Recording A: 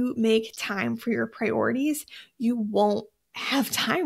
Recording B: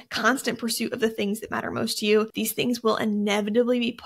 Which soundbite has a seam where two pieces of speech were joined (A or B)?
B